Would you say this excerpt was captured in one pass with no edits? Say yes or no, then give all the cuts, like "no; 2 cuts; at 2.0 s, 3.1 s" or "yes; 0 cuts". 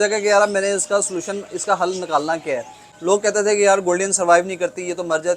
no; 1 cut; at 2.8 s